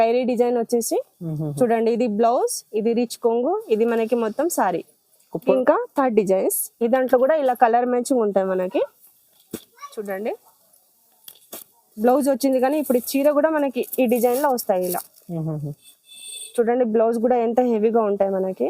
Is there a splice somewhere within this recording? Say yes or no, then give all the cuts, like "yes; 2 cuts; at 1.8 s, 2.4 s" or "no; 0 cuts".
yes; 2 cuts; at 5.5 s, 11.9 s